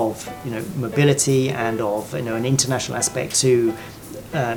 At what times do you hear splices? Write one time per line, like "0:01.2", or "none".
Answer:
none